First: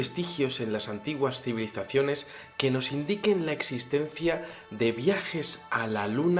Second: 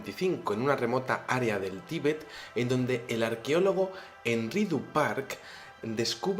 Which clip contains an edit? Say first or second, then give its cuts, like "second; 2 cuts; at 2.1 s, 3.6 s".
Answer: second; 1 cut; at 3.2 s